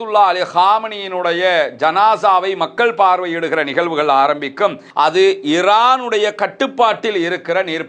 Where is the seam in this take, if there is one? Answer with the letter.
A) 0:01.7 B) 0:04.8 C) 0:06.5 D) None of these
B